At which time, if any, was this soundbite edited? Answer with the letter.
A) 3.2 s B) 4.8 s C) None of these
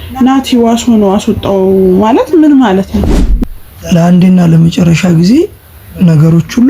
A